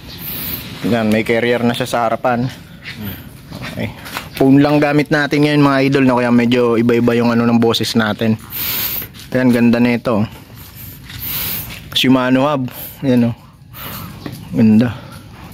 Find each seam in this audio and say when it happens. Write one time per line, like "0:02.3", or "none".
none